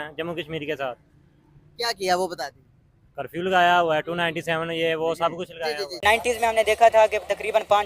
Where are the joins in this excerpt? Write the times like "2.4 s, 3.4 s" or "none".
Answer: 6.0 s